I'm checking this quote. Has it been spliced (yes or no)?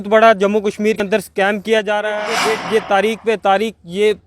yes